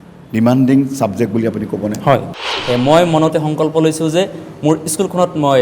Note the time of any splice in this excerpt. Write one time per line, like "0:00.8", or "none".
0:02.5

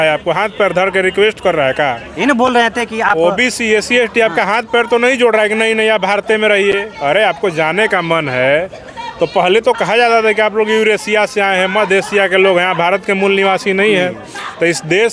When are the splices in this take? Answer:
none

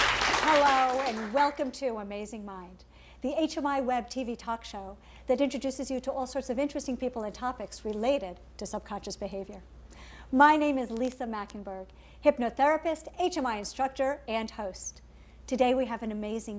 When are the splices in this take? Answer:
0:05.5

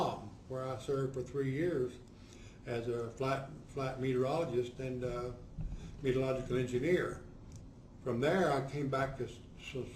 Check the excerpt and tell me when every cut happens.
0:03.1

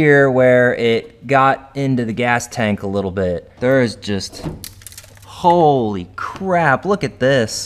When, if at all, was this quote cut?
0:03.5

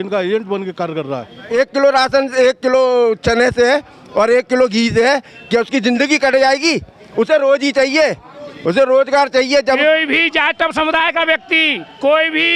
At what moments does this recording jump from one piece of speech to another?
0:01.5
0:09.8

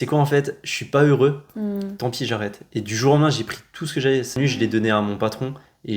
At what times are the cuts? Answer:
0:04.3

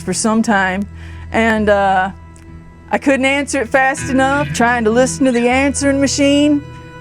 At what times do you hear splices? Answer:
0:04.5

